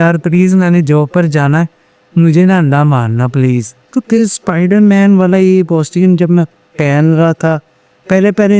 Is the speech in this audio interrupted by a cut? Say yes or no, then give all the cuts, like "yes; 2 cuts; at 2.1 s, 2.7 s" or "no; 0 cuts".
yes; 1 cut; at 3.8 s